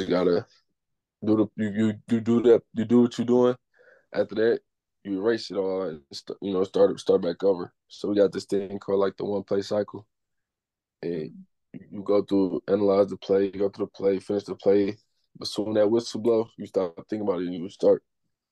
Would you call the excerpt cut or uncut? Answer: uncut